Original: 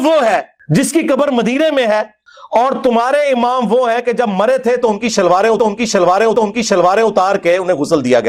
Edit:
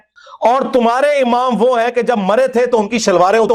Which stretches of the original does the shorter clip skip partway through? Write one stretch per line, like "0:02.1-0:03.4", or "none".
none